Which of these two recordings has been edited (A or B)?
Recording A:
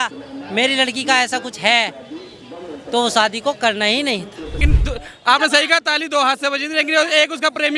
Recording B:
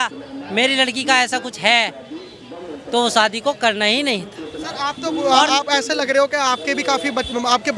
A